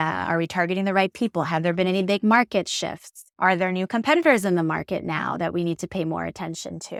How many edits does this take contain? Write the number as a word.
zero